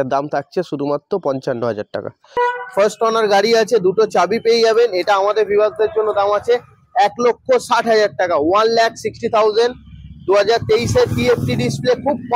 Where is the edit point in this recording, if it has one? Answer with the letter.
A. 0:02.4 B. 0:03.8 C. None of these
A